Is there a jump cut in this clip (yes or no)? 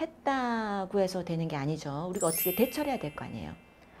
no